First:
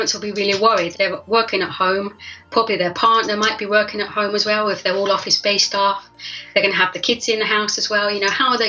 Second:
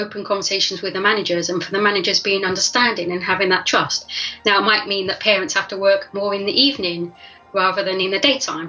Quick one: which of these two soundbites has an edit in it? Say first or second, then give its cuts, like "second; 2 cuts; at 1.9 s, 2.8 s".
first; 2 cuts; at 0.9 s, 2.4 s